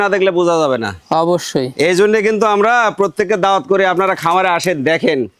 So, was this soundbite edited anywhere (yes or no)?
no